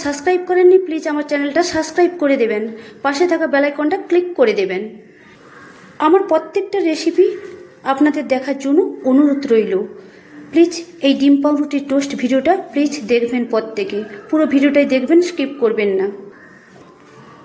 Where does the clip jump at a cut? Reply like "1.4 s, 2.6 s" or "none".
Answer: 16.3 s

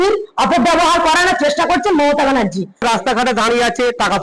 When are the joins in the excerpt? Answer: 2.8 s

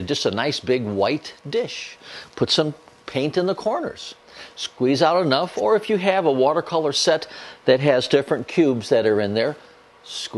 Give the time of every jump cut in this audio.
5.3 s

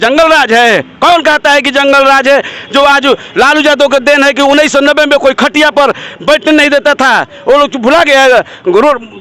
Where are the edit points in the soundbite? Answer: none

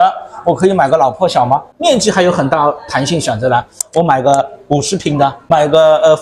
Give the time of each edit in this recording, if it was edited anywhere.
1.7 s, 3.8 s, 5.4 s

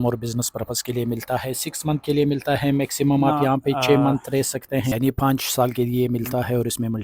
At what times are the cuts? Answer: 4.9 s

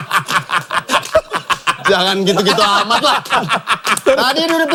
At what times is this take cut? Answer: none

